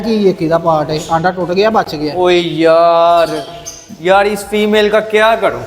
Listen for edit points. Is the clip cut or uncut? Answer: uncut